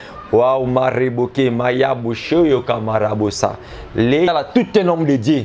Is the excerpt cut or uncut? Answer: cut